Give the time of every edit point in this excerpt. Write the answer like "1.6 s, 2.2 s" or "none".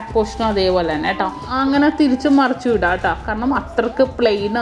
1.4 s

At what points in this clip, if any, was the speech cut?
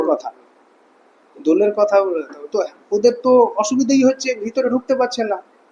none

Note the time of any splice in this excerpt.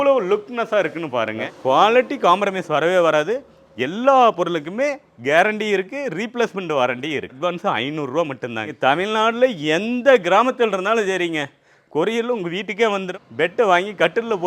1.4 s, 7.3 s, 8.7 s, 13.1 s

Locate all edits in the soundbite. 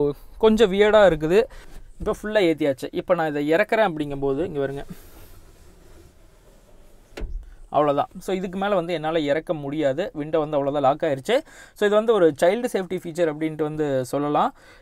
1.6 s

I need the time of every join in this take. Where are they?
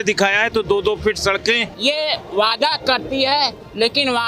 1.7 s

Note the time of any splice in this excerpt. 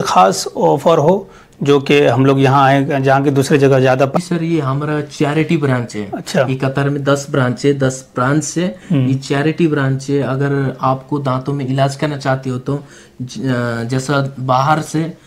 4.2 s

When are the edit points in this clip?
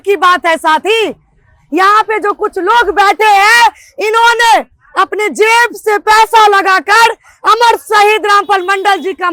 none

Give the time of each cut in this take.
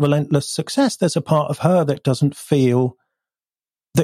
none

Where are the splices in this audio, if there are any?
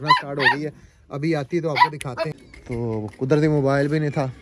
2.4 s

